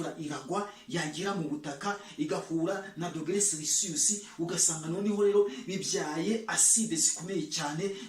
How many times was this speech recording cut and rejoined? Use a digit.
0